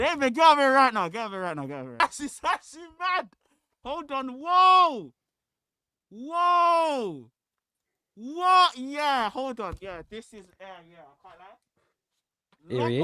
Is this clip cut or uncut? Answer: cut